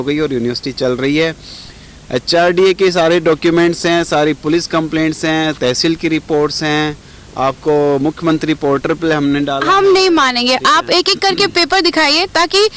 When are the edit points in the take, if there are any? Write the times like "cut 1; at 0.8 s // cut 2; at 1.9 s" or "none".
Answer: none